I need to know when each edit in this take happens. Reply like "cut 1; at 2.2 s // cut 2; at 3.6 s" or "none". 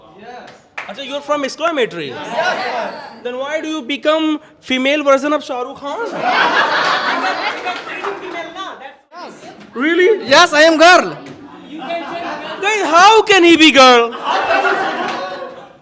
cut 1; at 9.2 s